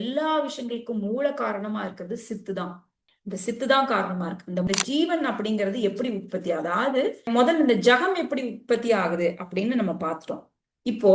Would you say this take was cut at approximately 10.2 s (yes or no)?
no